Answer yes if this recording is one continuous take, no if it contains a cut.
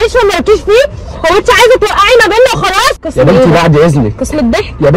no